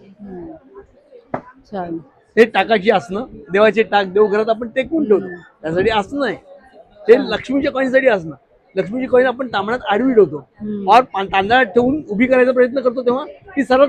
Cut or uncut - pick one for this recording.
uncut